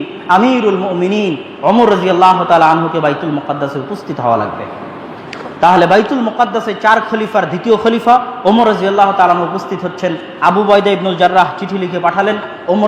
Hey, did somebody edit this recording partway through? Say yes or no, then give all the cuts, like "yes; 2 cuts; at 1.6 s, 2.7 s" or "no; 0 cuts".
no; 0 cuts